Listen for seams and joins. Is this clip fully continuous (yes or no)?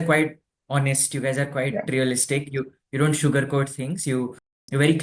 yes